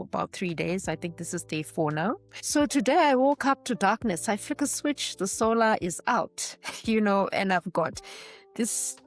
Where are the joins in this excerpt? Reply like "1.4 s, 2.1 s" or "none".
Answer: 2.3 s